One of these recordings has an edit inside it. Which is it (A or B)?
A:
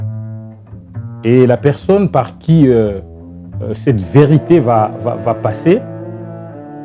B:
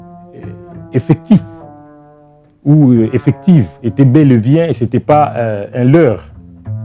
B